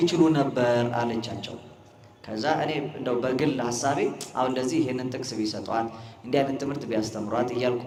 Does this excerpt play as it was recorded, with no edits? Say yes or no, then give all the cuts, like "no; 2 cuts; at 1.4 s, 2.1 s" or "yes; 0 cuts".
yes; 0 cuts